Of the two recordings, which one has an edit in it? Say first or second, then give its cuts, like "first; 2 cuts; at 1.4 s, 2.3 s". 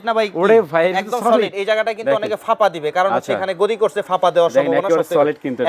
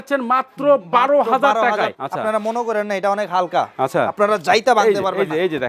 second; 1 cut; at 2.0 s